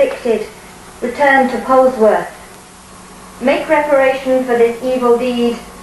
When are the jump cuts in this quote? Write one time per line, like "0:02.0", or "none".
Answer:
0:01.0